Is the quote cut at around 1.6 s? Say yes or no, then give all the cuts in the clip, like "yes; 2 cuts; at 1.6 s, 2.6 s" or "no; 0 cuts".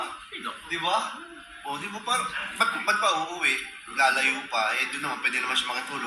no; 0 cuts